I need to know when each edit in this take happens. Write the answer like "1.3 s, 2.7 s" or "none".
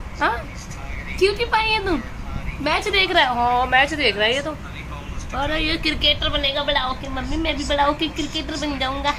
none